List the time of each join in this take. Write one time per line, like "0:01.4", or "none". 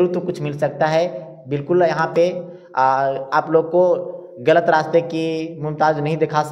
none